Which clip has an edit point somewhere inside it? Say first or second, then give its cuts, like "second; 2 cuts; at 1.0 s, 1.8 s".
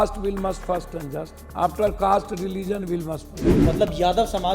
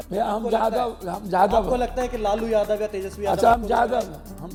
first; 2 cuts; at 1.4 s, 3.4 s